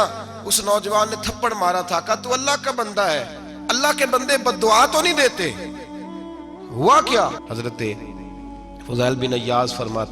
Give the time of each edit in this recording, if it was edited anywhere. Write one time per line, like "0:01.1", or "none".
0:07.4